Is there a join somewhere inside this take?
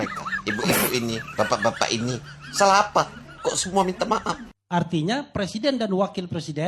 yes; 1 cut; at 4.4 s

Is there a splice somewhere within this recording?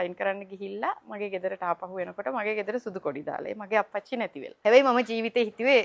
yes; 1 cut; at 4.5 s

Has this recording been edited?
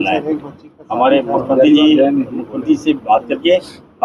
no; 0 cuts

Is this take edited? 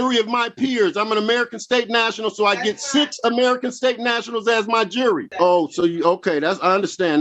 yes; 1 cut; at 5.3 s

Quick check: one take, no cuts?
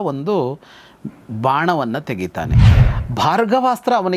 no; 1 cut; at 2.7 s

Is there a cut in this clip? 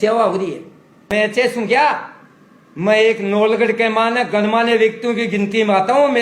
yes; 1 cut; at 1.1 s

